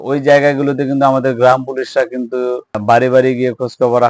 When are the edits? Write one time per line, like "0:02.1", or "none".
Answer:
0:02.8